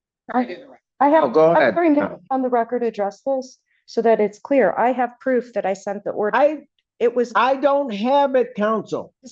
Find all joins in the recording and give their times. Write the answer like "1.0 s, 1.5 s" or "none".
none